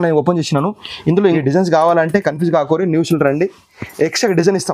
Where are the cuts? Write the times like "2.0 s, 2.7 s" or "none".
1.4 s